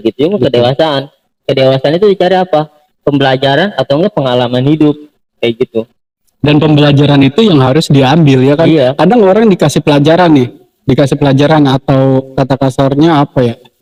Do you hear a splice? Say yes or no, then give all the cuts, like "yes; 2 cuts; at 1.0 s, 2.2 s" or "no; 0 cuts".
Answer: no; 0 cuts